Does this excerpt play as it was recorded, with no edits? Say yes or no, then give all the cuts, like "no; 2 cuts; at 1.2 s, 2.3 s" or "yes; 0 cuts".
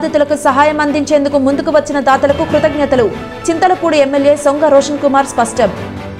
yes; 0 cuts